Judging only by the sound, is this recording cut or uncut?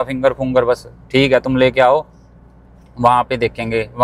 uncut